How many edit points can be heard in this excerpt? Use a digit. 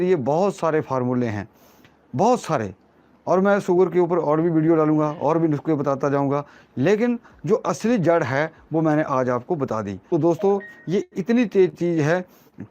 1